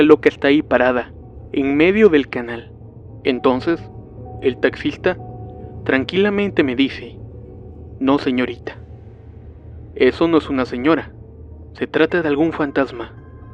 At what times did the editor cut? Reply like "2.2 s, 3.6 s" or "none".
8.4 s